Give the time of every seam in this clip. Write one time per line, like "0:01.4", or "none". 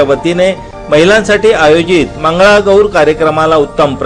none